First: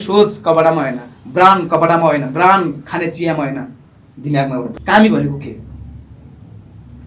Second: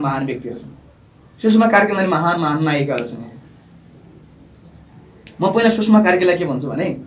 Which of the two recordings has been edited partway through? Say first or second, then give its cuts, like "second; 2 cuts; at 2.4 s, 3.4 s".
first; 1 cut; at 4.7 s